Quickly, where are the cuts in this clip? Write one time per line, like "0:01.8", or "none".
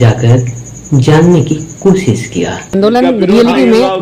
0:02.6